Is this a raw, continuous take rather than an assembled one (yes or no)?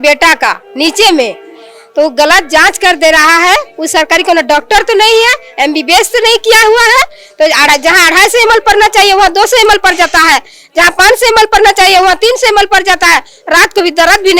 yes